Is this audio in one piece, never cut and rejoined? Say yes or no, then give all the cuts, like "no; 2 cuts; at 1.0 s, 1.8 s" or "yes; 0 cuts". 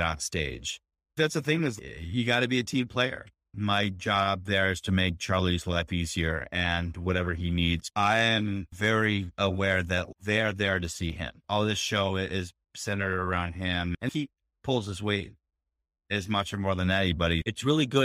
yes; 0 cuts